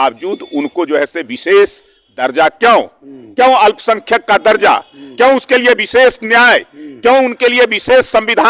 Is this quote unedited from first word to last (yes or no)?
yes